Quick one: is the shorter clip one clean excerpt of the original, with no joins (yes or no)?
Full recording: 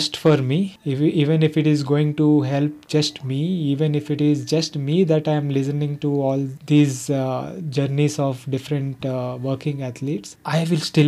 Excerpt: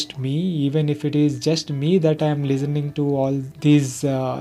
yes